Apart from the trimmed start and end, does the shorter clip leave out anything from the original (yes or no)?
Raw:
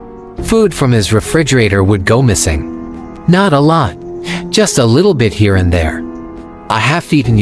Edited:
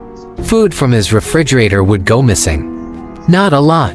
no